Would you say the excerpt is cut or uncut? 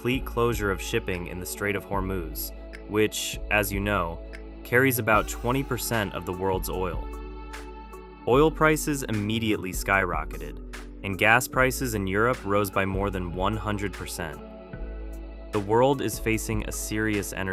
uncut